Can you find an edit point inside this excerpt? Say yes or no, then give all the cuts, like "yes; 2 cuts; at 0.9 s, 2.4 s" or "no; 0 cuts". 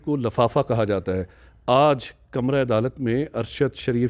no; 0 cuts